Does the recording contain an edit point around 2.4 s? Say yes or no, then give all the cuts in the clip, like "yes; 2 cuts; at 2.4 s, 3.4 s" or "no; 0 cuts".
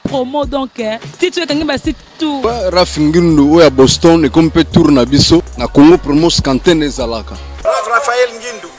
yes; 3 cuts; at 2.4 s, 5.6 s, 7.5 s